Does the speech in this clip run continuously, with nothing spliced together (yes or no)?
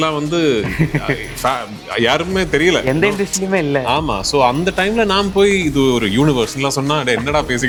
yes